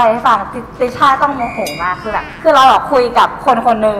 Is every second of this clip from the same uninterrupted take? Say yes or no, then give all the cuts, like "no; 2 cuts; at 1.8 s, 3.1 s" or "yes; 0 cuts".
yes; 0 cuts